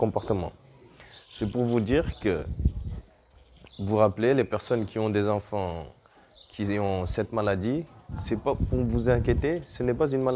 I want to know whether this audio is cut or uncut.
uncut